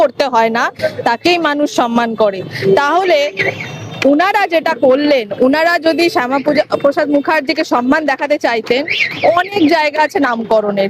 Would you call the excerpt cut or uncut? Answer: uncut